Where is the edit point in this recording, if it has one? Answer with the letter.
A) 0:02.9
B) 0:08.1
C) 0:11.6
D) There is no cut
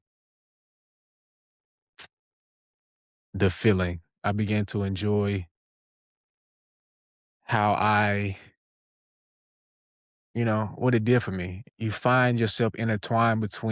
C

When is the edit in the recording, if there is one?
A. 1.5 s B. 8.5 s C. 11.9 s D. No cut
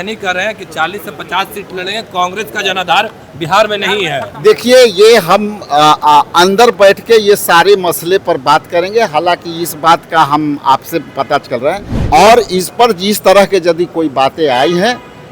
C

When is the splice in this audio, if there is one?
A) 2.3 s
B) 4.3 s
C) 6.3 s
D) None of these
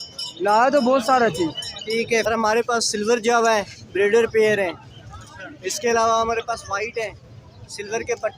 A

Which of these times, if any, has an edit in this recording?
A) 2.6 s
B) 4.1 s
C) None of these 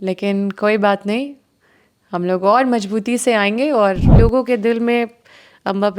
B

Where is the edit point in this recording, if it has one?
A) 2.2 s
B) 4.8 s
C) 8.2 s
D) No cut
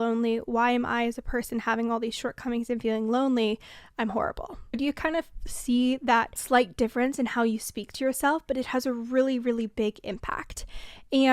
B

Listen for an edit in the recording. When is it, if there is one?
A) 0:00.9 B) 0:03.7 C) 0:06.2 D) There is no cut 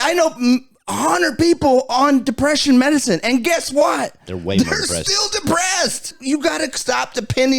C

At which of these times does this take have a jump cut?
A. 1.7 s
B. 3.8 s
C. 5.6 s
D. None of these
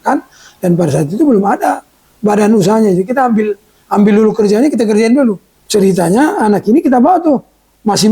C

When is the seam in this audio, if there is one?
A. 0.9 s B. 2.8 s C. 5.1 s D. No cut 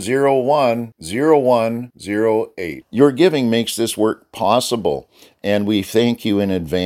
D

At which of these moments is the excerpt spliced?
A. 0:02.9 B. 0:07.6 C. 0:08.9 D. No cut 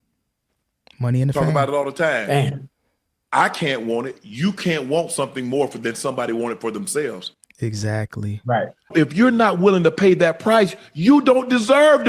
C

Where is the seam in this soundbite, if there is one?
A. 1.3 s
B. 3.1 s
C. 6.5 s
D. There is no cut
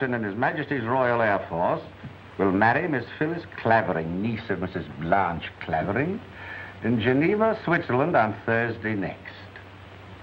D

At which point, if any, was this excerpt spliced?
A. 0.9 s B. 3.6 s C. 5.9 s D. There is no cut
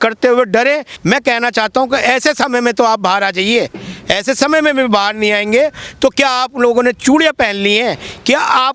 A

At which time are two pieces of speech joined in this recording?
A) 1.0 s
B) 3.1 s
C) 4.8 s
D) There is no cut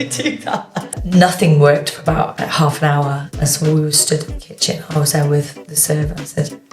A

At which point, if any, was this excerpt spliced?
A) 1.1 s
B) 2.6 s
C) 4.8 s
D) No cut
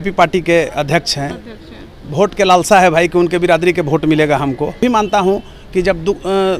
C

